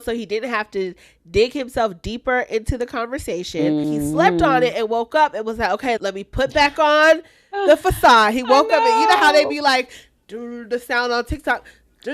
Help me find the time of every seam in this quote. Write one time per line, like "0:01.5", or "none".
0:03.9
0:06.0